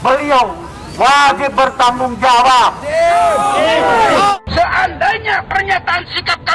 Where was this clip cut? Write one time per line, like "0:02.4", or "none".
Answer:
0:04.3